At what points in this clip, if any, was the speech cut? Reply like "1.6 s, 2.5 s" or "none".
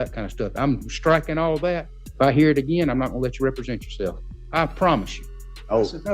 2.0 s, 4.3 s, 5.3 s